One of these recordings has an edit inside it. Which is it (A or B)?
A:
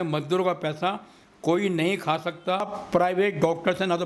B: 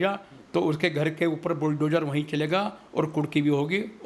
A